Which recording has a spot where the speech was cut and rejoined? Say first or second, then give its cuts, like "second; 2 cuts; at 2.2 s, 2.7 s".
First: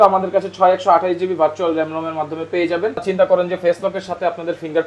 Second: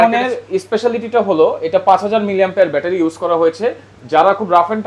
first; 1 cut; at 3.1 s